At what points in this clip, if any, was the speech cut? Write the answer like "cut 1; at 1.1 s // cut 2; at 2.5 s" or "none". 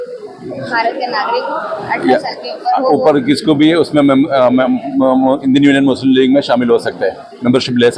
none